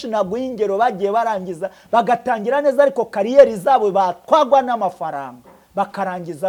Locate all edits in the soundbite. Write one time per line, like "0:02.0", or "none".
none